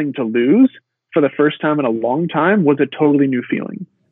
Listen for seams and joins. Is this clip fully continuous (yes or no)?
yes